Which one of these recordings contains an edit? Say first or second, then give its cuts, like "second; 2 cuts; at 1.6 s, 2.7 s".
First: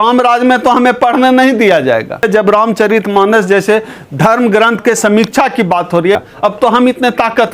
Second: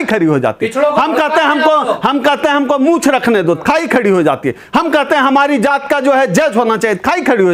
first; 2 cuts; at 2.2 s, 6.1 s